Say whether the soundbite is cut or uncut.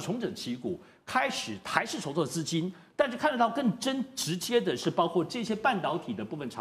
uncut